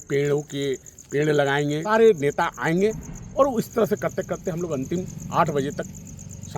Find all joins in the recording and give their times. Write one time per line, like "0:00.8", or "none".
0:01.8